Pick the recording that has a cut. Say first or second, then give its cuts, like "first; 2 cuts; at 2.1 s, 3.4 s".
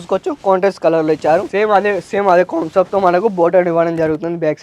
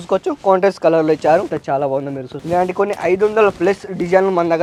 first; 1 cut; at 1.5 s